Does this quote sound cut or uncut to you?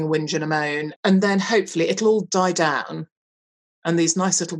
cut